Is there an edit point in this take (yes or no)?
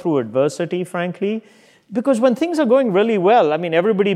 no